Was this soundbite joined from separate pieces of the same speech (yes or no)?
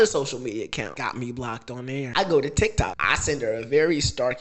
yes